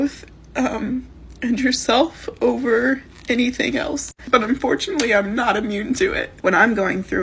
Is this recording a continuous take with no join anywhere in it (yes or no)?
no